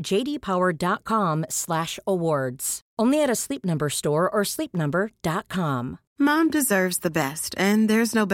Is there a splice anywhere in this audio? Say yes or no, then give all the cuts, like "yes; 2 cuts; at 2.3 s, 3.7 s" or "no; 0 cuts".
yes; 1 cut; at 6.0 s